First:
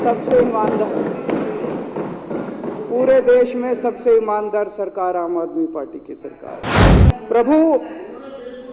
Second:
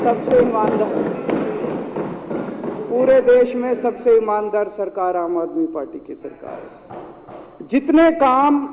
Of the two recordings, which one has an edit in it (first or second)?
first